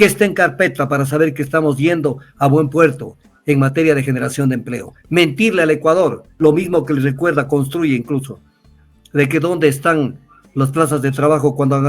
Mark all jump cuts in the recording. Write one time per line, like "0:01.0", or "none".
0:06.2